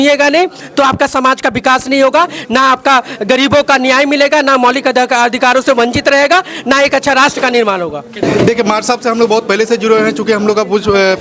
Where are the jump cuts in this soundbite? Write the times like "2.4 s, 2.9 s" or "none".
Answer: none